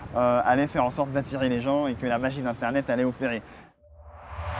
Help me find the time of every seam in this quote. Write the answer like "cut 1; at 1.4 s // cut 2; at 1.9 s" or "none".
cut 1; at 3.7 s